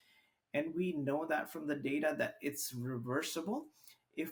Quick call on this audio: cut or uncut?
uncut